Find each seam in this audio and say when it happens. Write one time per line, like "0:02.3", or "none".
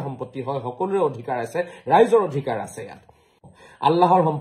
0:03.5